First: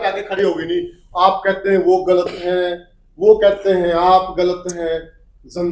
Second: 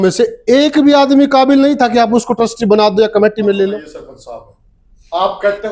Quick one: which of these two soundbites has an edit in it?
second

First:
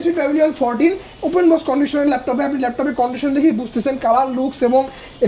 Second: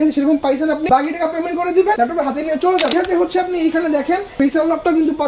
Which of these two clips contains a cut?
second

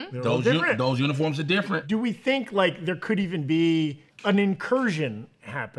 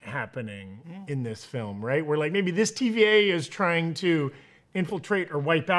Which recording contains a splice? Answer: first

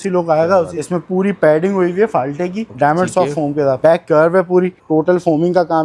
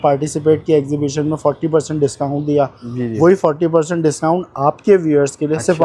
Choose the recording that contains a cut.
first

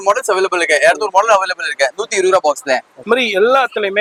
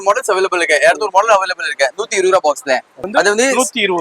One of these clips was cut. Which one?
second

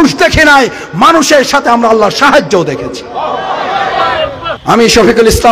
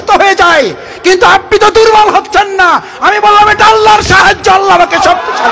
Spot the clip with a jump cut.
first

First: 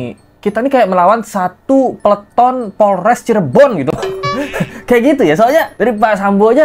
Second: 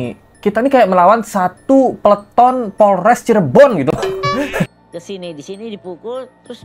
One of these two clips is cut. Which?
second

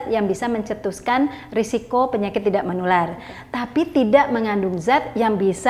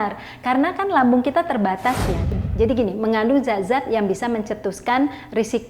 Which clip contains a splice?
second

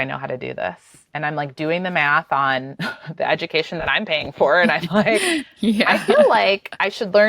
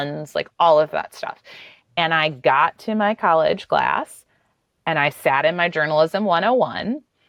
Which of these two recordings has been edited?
first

